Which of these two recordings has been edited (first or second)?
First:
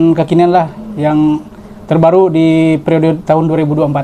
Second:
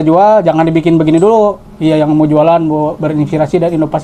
second